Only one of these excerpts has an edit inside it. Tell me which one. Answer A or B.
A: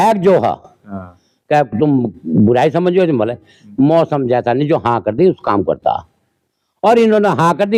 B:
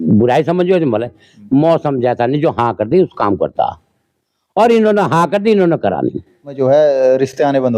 B